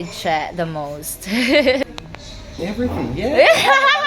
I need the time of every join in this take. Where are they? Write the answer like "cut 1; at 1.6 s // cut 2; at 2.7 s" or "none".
cut 1; at 1.8 s